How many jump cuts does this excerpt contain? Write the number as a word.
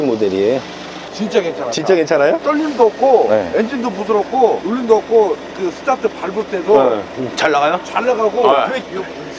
two